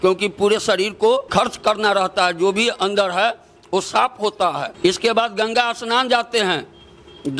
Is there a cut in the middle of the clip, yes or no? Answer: yes